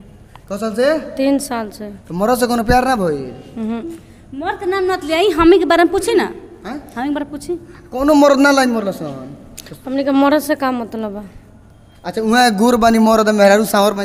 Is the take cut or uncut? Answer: uncut